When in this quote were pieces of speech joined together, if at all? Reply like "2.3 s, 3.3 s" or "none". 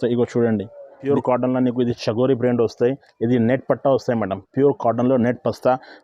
1.0 s